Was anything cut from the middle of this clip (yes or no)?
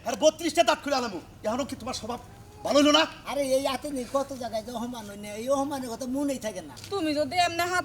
yes